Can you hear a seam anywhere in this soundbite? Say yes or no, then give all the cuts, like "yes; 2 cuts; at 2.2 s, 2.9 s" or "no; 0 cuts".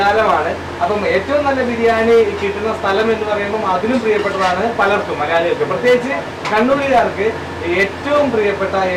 no; 0 cuts